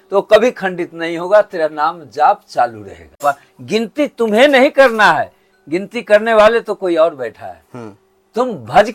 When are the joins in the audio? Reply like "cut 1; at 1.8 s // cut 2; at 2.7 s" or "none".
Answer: cut 1; at 3.2 s